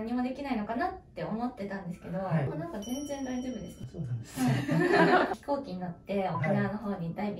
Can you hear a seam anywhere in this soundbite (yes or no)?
yes